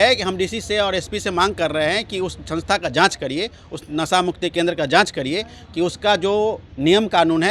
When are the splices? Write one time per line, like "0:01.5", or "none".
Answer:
none